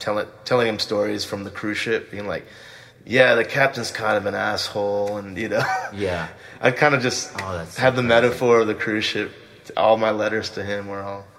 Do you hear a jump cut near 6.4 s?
yes; 1 cut; at 6.4 s

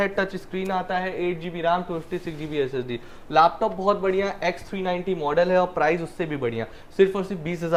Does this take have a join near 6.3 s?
no; 0 cuts

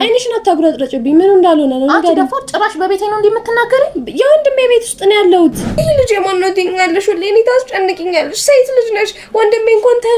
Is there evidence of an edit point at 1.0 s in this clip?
no; 1 cut; at 5.6 s

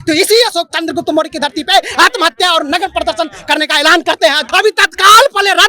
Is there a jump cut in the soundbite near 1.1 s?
no; 1 cut; at 4.4 s

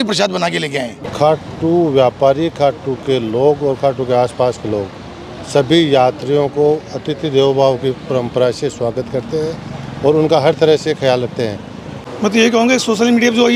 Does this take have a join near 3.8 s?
no; 2 cuts; at 1.0 s, 12.0 s

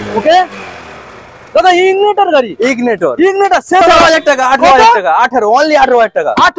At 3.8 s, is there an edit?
yes; 1 cut; at 3.8 s

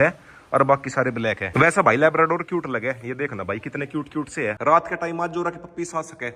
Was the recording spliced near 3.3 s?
no; 2 cuts; at 1.5 s, 4.6 s

